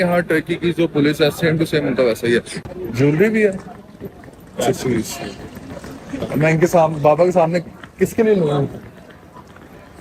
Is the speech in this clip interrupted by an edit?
yes; 1 cut; at 2.5 s

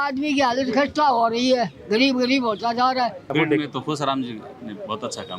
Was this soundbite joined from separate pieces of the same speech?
yes; 1 cut; at 3.3 s

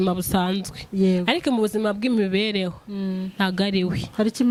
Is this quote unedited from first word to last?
yes; 0 cuts

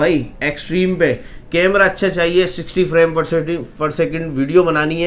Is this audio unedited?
yes; 0 cuts

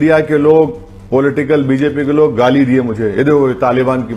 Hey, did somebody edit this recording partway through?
no; 0 cuts

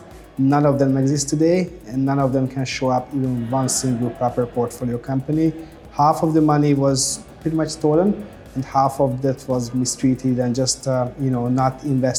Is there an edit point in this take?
no; 0 cuts

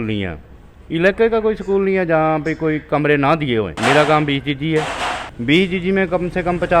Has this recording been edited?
yes; 2 cuts; at 3.7 s, 5.3 s

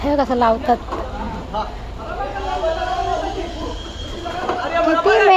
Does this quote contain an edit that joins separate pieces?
no; 0 cuts

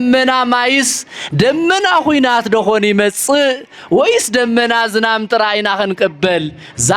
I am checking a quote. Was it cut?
no; 0 cuts

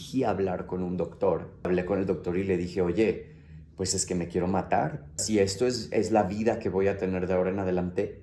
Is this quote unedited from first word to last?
no; 2 cuts; at 1.7 s, 5.2 s

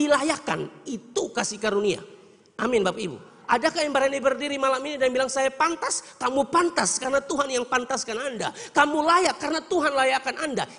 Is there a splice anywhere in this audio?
no; 0 cuts

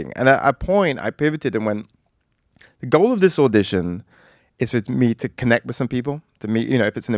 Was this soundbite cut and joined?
no; 0 cuts

